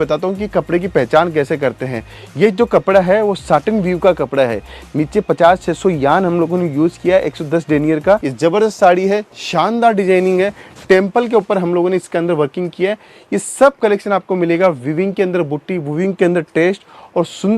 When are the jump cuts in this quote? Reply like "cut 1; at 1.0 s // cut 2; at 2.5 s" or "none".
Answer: cut 1; at 8.3 s